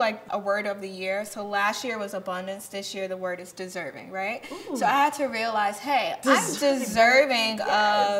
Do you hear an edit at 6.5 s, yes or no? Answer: no